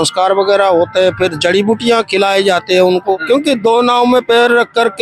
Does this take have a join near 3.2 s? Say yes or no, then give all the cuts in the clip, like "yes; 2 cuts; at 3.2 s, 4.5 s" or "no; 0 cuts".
yes; 1 cut; at 3.2 s